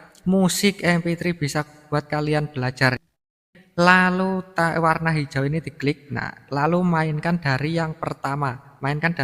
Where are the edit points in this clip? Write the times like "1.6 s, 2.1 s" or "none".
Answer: 3.4 s